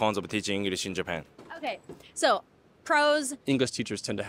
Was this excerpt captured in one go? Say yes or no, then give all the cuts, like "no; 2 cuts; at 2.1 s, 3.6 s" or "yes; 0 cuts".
no; 1 cut; at 3.3 s